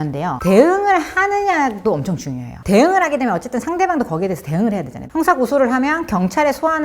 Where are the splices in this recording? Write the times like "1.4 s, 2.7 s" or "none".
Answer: 2.5 s, 5.0 s

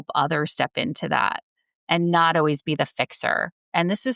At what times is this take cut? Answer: none

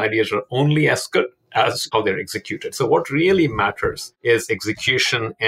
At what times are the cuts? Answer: 1.9 s, 4.1 s

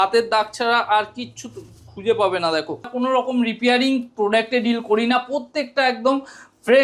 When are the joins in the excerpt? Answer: 2.9 s

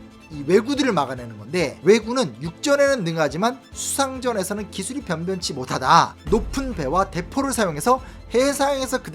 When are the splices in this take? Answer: 1.8 s, 6.2 s

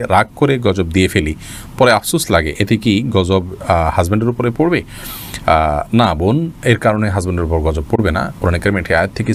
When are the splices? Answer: none

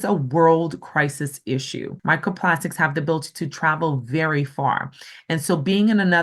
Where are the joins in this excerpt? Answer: 1.9 s

